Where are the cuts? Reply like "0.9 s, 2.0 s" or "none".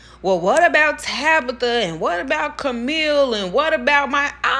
none